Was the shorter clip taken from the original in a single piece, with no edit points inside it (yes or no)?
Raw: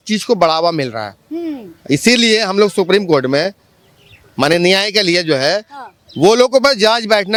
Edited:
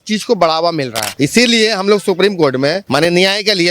no